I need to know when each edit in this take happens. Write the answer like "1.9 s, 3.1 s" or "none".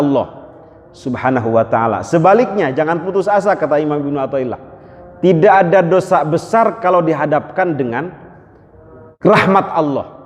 9.1 s